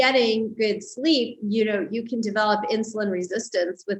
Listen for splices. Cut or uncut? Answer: uncut